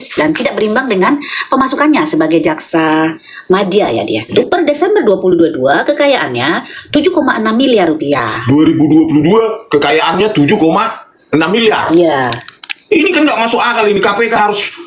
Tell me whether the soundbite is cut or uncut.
cut